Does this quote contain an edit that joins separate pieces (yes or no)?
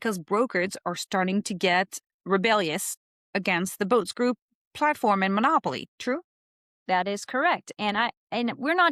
no